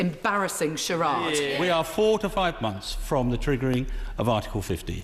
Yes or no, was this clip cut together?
yes